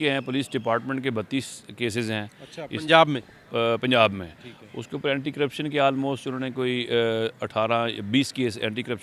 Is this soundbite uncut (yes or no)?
yes